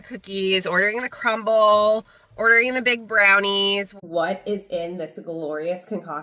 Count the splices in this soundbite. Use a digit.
1